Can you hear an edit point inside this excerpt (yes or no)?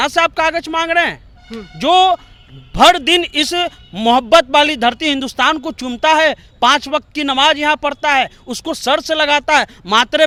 no